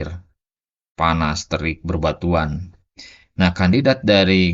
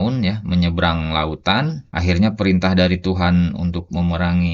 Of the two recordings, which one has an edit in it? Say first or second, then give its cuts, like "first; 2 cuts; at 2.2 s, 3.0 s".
second; 1 cut; at 1.9 s